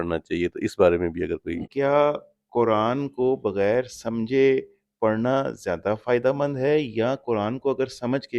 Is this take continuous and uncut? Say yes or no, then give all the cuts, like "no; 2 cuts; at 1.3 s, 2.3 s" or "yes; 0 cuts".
no; 1 cut; at 1.7 s